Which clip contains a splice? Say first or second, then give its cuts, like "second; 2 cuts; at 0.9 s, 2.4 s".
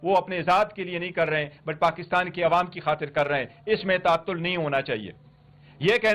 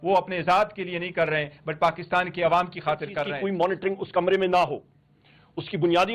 second; 1 cut; at 3.2 s